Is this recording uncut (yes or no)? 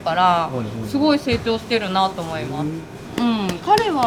yes